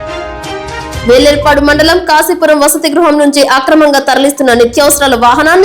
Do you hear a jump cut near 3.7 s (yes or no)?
no